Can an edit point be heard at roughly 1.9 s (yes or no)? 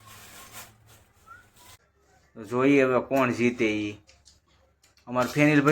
yes